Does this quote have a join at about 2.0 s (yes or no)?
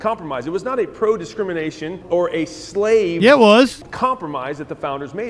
yes